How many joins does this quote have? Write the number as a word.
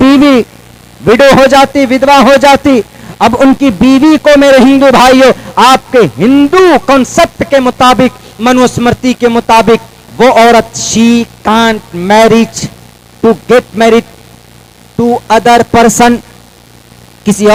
zero